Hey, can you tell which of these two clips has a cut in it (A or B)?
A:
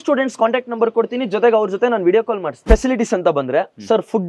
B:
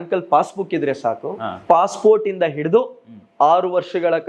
A